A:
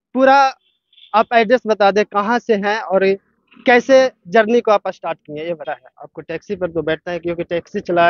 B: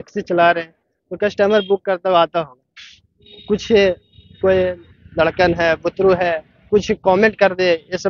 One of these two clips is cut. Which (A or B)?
A